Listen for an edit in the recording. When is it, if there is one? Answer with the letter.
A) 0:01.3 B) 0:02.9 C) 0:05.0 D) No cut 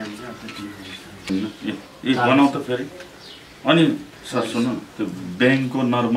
A